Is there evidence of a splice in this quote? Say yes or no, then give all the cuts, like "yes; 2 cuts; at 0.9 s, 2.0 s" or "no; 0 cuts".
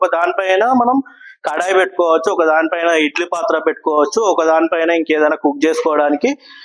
no; 0 cuts